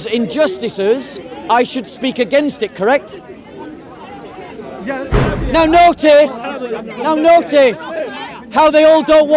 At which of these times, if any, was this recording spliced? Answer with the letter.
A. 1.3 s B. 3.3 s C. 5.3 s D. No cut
C